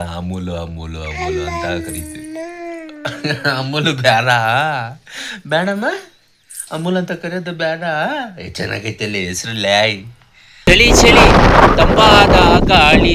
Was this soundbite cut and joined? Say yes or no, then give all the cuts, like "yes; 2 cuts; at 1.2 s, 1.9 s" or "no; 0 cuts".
yes; 1 cut; at 10.7 s